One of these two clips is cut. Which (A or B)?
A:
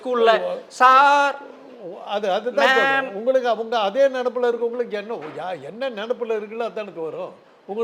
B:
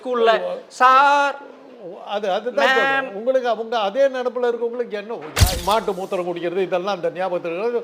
B